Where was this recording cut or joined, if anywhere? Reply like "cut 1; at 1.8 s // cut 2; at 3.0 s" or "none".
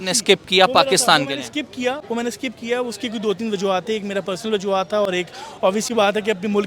none